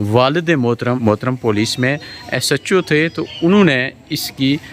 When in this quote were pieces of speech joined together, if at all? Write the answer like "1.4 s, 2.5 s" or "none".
1.0 s